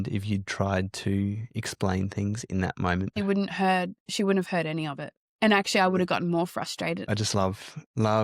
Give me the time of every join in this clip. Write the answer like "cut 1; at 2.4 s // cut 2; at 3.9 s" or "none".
cut 1; at 3.1 s // cut 2; at 7.0 s